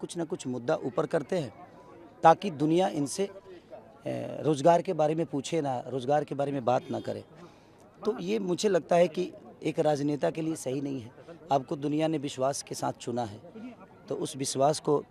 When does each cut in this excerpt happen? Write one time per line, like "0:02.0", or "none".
none

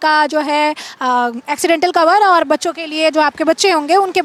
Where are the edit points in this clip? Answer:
none

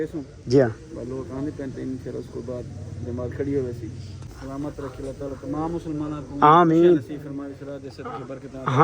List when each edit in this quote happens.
0:04.3

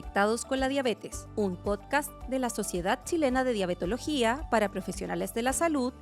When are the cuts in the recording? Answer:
none

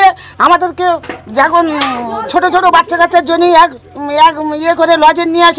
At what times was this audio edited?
none

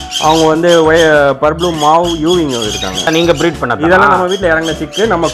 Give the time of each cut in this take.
0:03.1

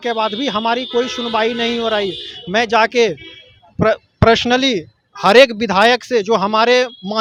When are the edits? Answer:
none

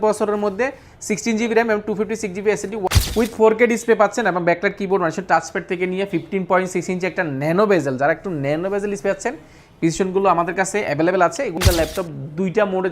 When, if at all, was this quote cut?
0:02.9
0:11.5

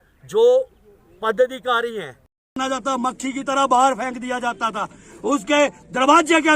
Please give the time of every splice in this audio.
0:02.6

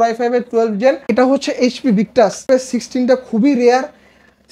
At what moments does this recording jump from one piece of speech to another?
0:01.1
0:02.4

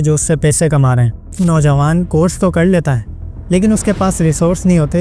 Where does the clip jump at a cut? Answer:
0:01.3

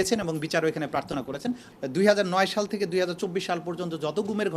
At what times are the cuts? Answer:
0:01.6

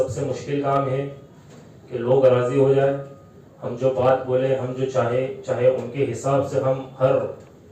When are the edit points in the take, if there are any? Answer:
none

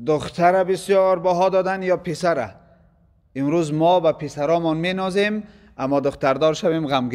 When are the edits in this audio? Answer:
none

